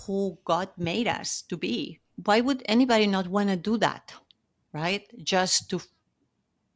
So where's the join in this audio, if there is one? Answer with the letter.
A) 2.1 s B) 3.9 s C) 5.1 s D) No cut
A